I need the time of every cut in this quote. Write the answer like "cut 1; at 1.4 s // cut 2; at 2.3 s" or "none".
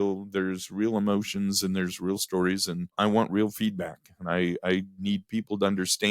cut 1; at 2.9 s